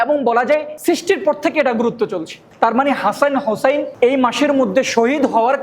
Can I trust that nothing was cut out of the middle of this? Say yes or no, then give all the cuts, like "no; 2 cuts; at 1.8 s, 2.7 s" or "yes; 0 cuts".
no; 1 cut; at 2.4 s